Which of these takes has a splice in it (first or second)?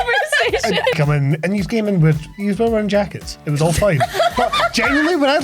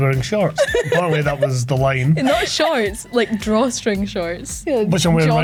first